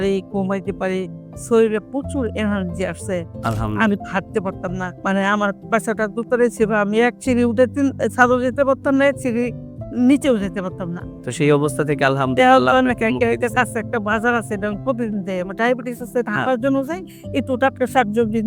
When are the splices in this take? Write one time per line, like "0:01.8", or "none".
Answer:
0:04.9